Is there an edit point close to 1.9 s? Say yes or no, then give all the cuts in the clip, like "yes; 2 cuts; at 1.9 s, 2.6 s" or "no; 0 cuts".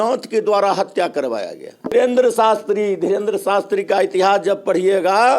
yes; 1 cut; at 1.9 s